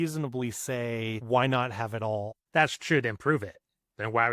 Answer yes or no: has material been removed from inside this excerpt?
yes